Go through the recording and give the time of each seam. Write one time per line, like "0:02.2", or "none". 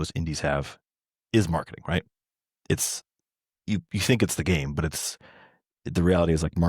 none

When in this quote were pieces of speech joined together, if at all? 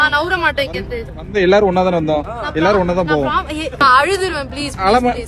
0:03.8

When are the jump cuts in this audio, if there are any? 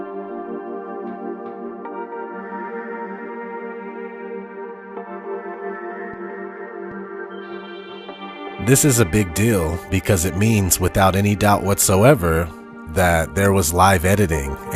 0:02.0

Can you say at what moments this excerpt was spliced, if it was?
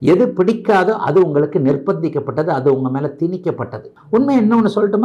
0:04.0

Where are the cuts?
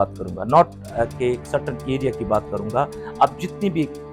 none

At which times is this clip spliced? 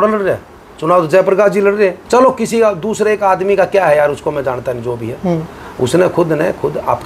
0:02.0

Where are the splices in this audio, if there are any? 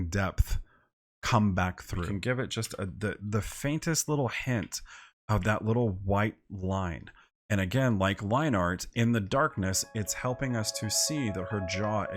0:02.1

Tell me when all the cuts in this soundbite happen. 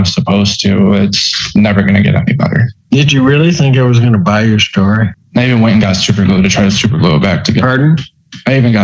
0:02.7
0:05.2

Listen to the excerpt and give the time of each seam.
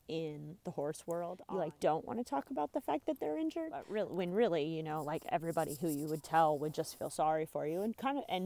0:01.4
0:03.9

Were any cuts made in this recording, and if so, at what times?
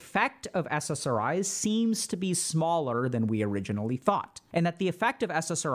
0:04.4

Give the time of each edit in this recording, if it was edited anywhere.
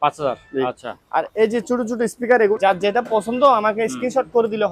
0:02.6

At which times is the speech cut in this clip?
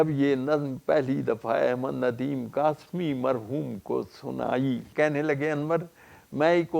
0:04.9

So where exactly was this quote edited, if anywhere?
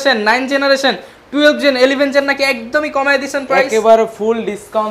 none

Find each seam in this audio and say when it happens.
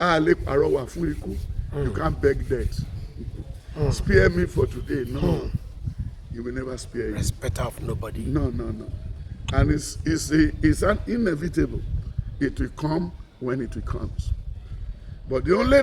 none

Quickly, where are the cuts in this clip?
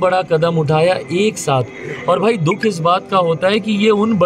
none

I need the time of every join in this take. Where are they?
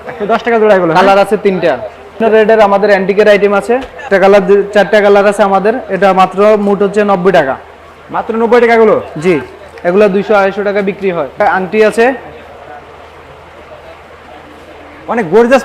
0:02.2
0:04.1
0:11.4

